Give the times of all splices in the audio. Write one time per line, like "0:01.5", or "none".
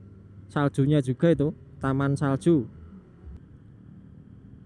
0:03.4

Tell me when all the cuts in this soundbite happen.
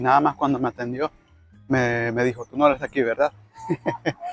none

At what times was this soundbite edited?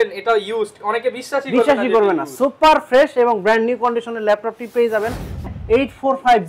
0:05.4

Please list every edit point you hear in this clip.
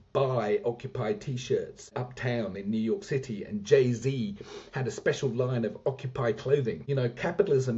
0:01.9
0:06.8

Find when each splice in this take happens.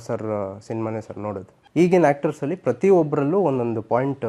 0:01.5

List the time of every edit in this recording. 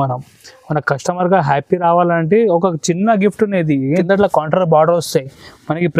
0:03.9

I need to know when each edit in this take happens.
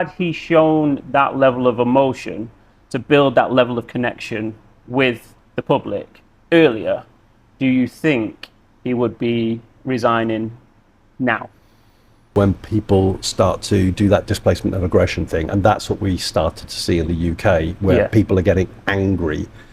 0:12.3

